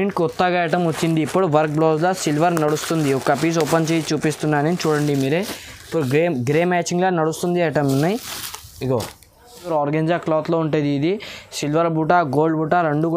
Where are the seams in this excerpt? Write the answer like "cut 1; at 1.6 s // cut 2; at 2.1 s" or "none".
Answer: cut 1; at 9.7 s